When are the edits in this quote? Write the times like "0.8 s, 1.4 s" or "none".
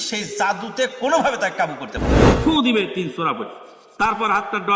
2.3 s